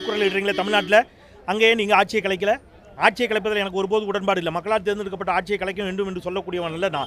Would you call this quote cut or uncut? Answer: uncut